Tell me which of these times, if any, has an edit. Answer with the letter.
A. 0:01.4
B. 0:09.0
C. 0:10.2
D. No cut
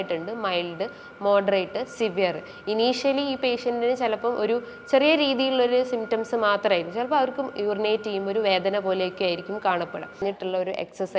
C